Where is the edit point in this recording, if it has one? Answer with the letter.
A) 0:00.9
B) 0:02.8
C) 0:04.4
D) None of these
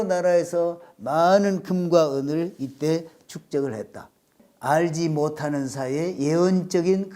C